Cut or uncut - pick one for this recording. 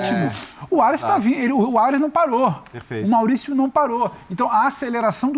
cut